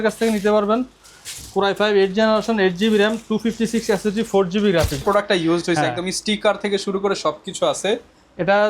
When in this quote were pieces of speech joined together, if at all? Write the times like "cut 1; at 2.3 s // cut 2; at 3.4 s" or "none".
cut 1; at 5.0 s